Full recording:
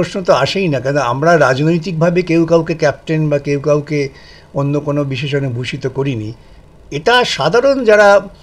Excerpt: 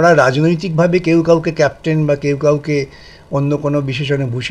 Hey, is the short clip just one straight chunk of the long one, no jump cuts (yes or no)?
yes